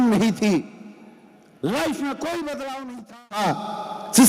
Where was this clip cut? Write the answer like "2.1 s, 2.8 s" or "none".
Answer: 3.1 s